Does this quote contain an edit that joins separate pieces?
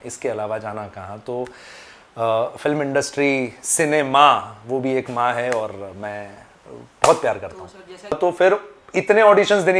yes; 1 cut; at 8.1 s

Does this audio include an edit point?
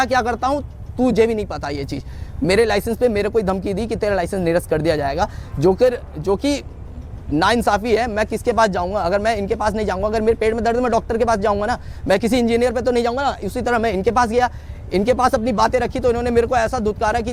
no; 0 cuts

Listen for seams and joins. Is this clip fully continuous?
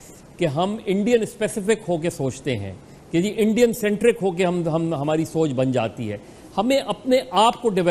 no; 1 cut; at 2.9 s

